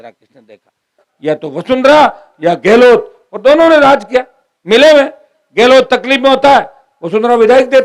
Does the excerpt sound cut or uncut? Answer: cut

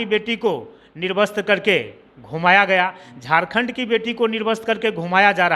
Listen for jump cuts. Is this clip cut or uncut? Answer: uncut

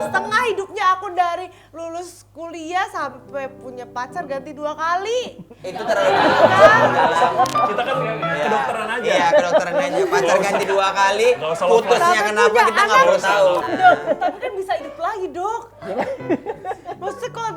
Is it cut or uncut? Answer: cut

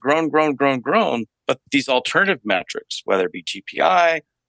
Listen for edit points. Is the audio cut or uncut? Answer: cut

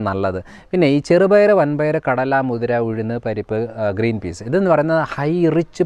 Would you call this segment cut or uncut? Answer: uncut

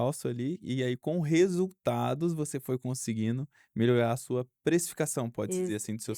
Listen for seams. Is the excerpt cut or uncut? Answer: uncut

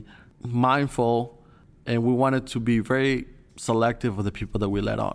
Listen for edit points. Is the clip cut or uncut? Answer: uncut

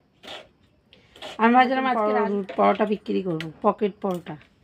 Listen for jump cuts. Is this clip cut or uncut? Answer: cut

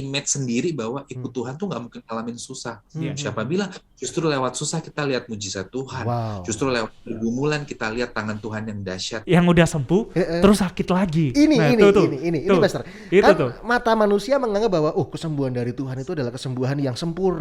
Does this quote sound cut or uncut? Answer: cut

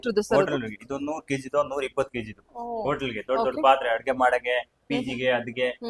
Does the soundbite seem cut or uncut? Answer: uncut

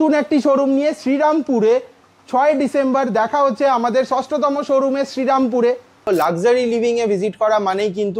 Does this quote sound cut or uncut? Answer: cut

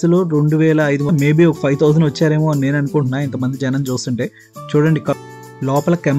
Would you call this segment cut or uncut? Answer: cut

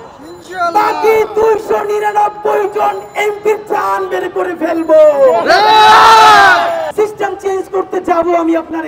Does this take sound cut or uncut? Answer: cut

